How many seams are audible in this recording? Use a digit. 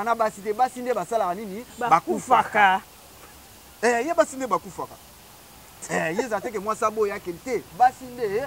0